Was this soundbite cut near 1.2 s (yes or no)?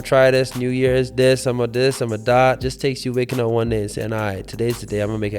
no